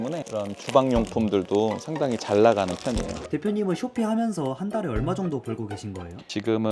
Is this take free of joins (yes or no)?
no